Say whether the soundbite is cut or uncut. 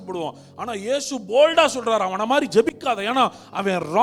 uncut